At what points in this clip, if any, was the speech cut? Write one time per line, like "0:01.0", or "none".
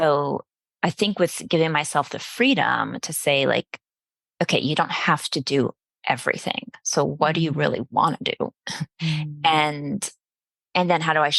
none